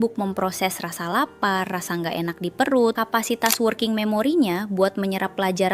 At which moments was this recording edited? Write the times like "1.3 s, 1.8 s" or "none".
3.0 s